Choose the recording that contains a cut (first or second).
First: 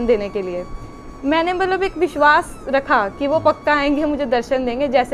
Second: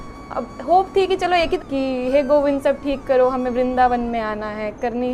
second